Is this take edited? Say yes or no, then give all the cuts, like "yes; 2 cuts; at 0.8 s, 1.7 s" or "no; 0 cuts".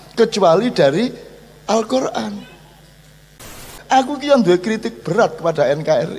yes; 1 cut; at 3.7 s